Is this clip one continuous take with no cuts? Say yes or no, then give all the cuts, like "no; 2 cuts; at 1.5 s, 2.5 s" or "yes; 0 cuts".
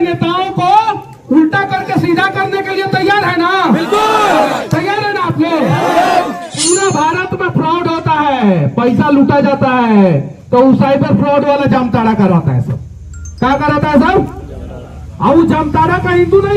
no; 1 cut; at 6.5 s